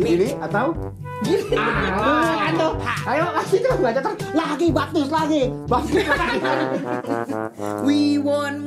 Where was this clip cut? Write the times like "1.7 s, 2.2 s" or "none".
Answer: none